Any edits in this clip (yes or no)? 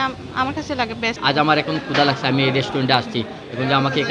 yes